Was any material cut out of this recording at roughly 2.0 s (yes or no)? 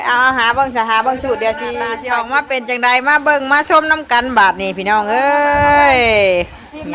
yes